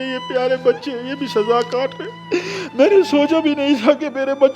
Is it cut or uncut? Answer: cut